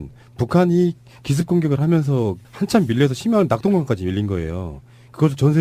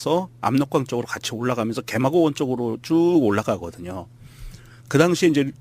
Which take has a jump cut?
second; 1 cut; at 1.7 s

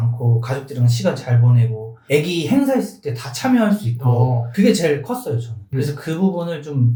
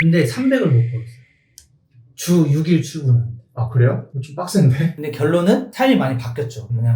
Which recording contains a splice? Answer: second; 1 cut; at 4.9 s

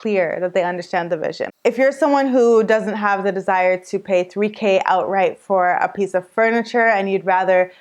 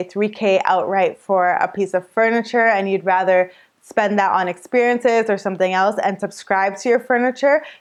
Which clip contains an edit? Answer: first; 1 cut; at 1.6 s

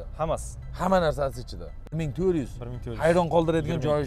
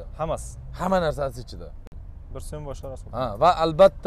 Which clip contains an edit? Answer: first; 1 cut; at 1.9 s

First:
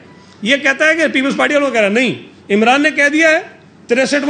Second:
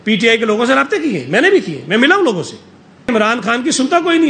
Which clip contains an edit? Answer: second; 1 cut; at 3.1 s

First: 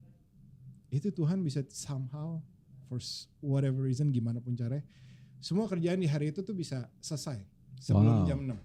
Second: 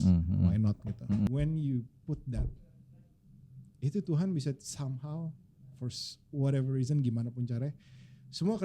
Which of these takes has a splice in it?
second; 1 cut; at 1.3 s

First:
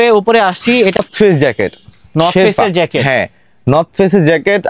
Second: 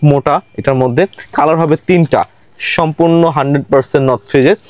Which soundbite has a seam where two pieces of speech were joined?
first; 1 cut; at 1.0 s

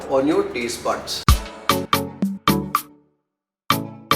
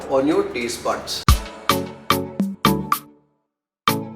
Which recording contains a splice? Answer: first; 1 cut; at 1.9 s

